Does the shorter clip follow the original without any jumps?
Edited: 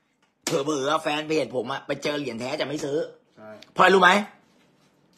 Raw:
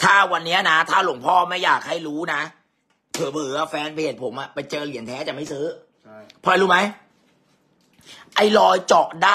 yes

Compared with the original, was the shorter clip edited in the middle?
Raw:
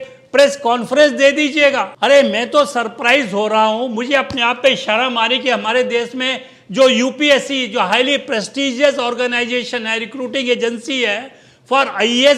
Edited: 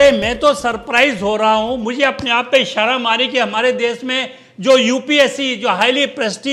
no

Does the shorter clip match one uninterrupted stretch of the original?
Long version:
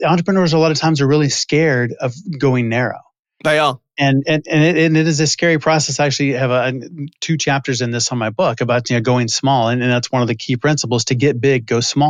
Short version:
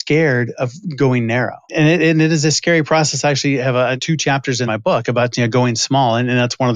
no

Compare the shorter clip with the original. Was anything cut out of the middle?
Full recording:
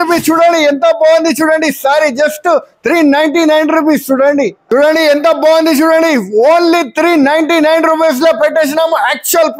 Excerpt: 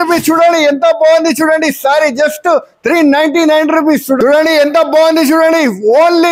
yes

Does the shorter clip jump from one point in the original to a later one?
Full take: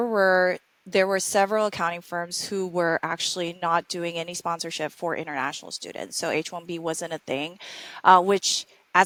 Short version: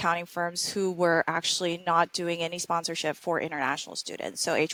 no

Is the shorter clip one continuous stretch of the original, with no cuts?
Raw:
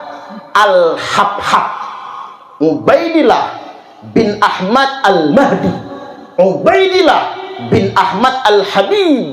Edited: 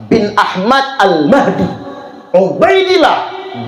yes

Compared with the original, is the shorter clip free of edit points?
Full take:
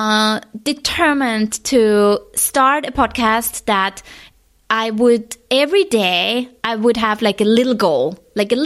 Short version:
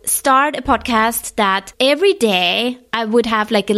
no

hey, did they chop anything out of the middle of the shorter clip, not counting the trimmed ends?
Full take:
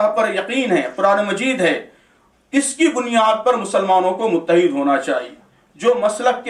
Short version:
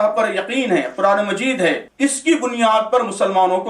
yes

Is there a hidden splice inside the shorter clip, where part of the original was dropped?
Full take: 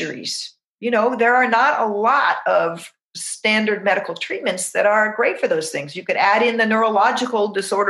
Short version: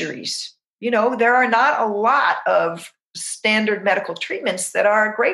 no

